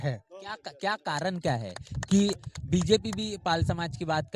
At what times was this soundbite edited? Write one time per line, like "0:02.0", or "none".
none

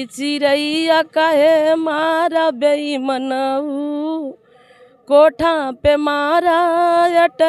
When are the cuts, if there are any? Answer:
none

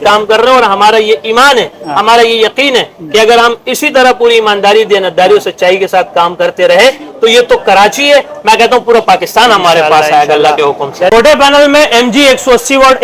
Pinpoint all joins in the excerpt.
0:11.1

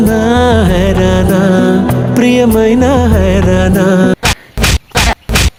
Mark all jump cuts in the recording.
none

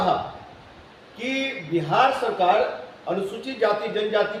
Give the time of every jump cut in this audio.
none

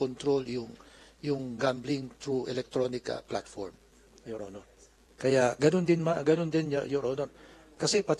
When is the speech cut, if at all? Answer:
none

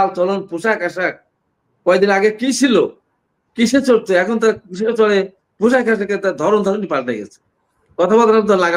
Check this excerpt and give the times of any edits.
none

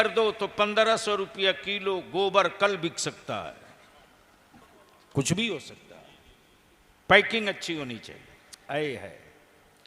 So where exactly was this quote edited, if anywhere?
0:04.8

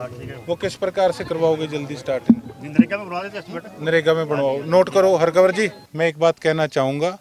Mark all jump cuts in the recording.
0:05.8

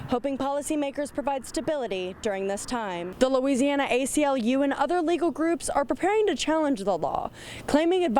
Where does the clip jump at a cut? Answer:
0:03.0

